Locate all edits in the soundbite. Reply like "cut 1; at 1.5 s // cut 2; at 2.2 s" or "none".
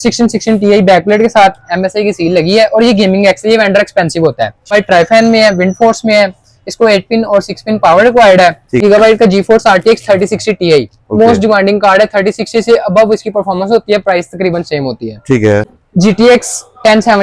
cut 1; at 4.7 s // cut 2; at 8.7 s // cut 3; at 15.8 s